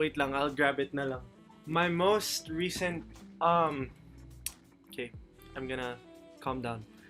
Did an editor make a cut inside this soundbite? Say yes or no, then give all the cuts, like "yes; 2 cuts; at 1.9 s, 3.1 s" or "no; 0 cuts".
no; 0 cuts